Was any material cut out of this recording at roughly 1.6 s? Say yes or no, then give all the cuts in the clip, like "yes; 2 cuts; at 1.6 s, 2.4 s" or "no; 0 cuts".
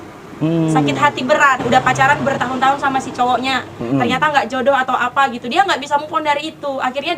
yes; 1 cut; at 1.6 s